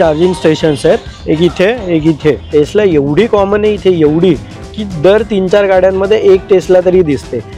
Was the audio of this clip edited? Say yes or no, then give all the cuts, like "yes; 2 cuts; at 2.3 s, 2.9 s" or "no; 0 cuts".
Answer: yes; 1 cut; at 2.5 s